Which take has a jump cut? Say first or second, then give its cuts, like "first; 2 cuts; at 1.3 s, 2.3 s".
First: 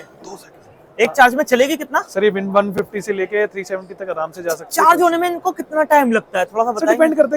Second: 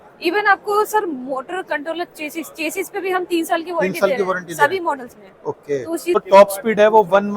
second; 1 cut; at 6.2 s